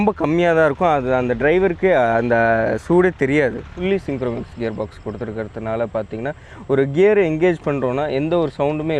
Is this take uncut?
no; 1 cut; at 3.7 s

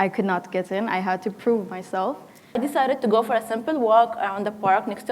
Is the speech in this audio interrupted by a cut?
yes; 1 cut; at 2.6 s

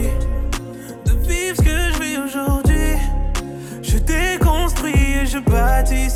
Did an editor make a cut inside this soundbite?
no; 0 cuts

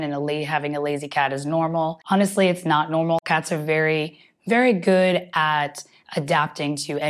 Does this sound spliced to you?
yes; 1 cut; at 2.0 s

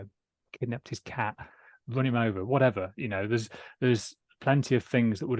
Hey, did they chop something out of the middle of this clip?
no; 0 cuts

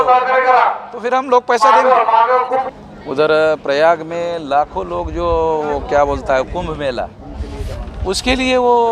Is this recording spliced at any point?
yes; 1 cut; at 2.6 s

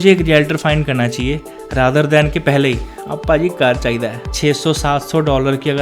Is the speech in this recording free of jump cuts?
no; 1 cut; at 4.3 s

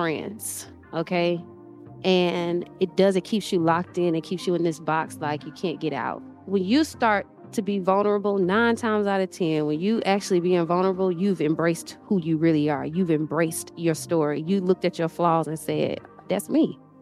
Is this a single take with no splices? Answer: no; 1 cut; at 6.2 s

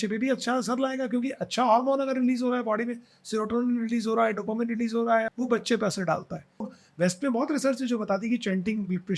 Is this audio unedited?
no; 2 cuts; at 5.3 s, 6.7 s

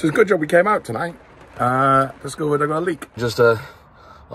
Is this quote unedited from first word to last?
no; 1 cut; at 3.2 s

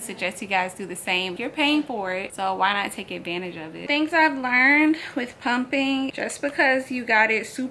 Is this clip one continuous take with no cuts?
no; 4 cuts; at 1.4 s, 2.3 s, 3.8 s, 6.1 s

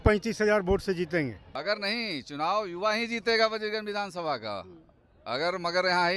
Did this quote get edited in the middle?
yes; 1 cut; at 1.4 s

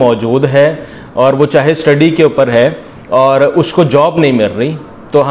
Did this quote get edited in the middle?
no; 0 cuts

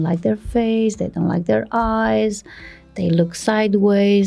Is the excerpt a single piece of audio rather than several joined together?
yes; 0 cuts

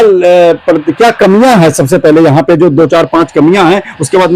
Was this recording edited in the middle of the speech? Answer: no; 0 cuts

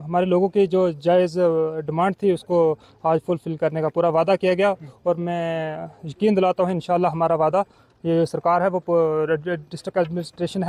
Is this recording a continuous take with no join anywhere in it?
yes; 0 cuts

